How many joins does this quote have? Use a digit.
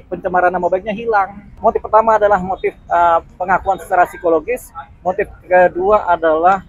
1